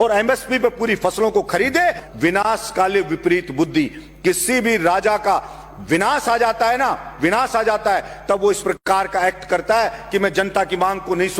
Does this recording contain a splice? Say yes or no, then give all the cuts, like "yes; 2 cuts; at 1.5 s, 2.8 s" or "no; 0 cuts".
yes; 1 cut; at 2.0 s